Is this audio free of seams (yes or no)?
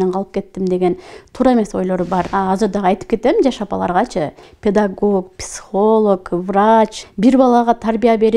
no